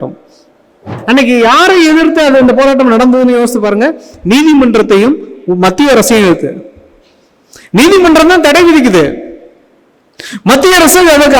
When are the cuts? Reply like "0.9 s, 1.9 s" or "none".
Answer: 0.9 s